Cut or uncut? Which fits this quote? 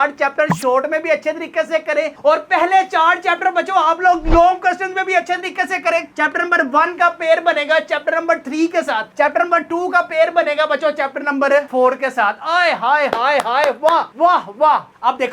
uncut